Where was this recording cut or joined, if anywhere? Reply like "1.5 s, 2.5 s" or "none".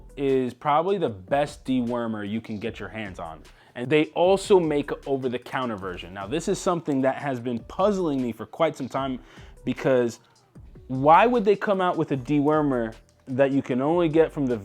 3.9 s